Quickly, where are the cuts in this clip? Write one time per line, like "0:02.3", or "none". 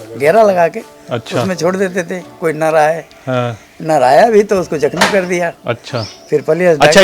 0:05.6